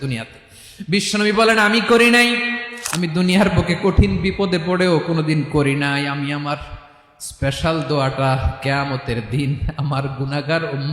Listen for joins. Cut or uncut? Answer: cut